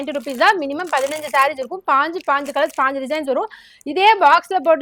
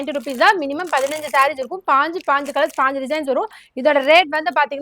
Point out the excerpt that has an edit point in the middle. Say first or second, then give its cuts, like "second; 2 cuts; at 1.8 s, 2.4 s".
second; 1 cut; at 3.7 s